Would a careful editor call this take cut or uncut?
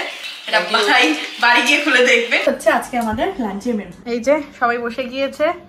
cut